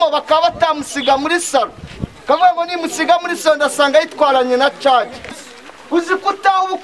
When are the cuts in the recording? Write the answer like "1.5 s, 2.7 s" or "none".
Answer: 5.4 s